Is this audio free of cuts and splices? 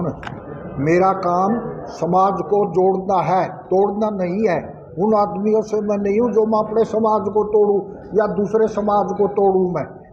yes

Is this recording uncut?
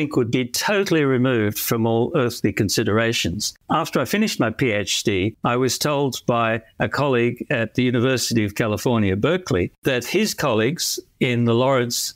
no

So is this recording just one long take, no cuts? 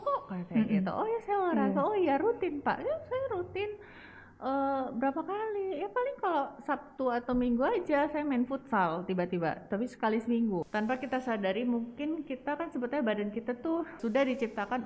no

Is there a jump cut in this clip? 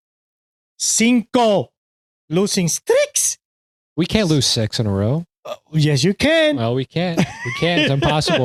no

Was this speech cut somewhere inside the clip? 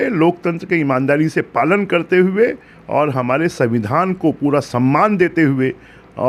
no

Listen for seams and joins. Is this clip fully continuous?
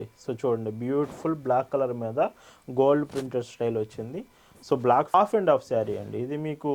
no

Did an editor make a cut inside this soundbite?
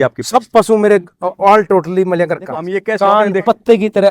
yes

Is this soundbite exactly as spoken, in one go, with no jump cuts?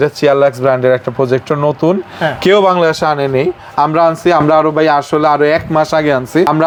yes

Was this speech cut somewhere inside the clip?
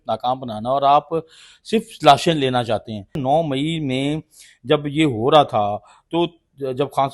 yes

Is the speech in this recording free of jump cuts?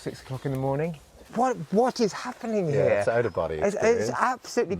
no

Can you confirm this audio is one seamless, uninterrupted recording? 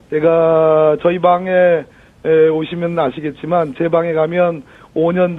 no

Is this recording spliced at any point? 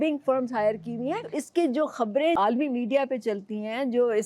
yes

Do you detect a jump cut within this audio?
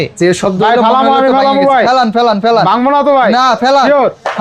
no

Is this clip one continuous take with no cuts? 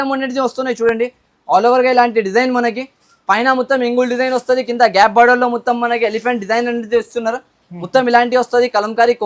yes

